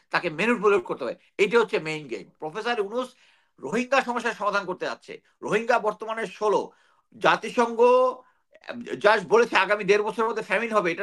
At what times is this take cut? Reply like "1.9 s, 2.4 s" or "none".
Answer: 2.3 s

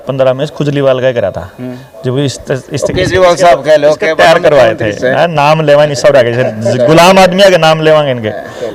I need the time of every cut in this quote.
none

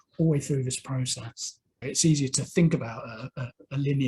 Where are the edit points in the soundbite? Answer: 1.8 s

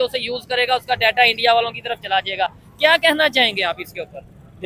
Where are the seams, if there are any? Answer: none

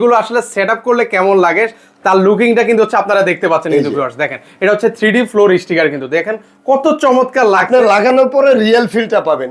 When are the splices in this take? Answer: none

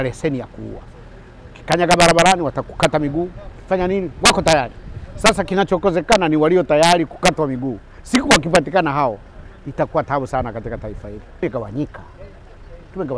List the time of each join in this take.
11.4 s

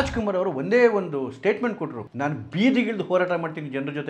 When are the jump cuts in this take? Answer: 2.0 s

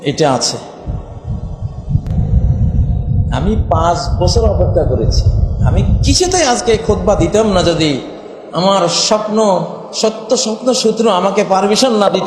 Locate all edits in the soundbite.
2.1 s

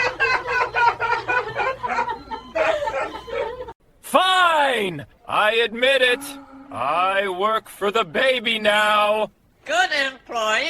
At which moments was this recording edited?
none

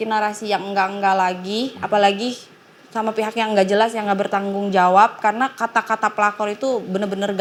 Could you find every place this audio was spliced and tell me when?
none

